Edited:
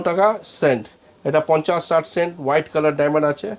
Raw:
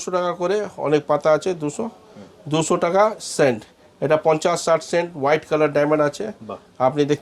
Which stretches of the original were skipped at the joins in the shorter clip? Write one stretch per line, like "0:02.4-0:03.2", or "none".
none